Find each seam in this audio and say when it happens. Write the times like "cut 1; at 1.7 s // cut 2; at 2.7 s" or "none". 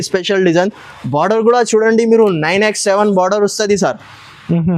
none